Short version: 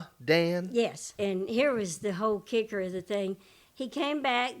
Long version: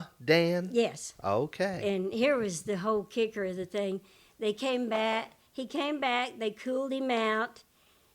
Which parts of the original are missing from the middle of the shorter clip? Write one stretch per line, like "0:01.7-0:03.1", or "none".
0:01.1-0:01.8
0:04.2-0:05.4